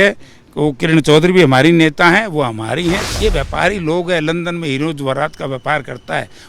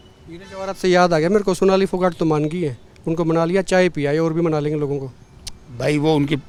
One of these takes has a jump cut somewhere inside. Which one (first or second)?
first